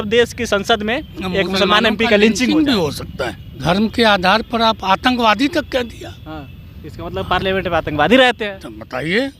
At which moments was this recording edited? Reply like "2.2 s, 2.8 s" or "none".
3.6 s